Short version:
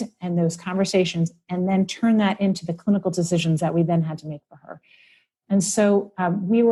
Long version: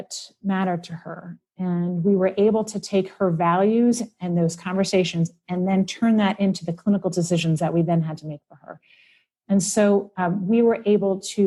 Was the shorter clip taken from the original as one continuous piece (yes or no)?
yes